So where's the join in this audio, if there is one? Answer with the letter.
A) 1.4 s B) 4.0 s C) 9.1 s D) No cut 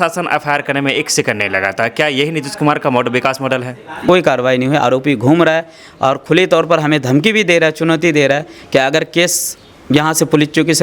B